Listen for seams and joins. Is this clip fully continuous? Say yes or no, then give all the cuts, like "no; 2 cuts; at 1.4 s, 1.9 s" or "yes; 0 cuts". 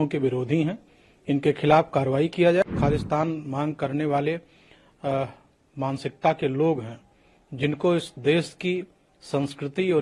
no; 1 cut; at 2.6 s